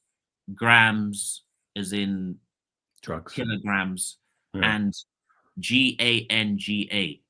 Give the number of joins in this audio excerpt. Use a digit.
0